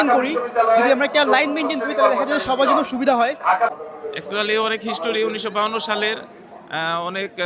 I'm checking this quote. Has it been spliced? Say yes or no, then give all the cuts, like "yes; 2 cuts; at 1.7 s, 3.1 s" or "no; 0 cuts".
yes; 1 cut; at 3.7 s